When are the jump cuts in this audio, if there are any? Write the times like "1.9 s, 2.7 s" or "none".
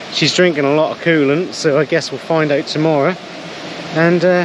none